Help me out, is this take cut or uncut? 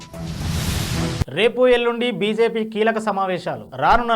cut